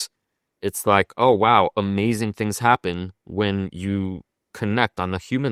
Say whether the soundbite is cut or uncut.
uncut